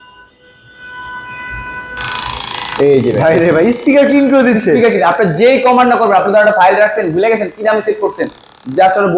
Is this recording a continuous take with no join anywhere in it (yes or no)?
yes